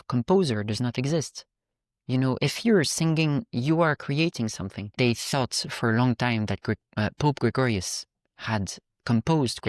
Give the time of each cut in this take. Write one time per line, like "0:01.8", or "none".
0:05.0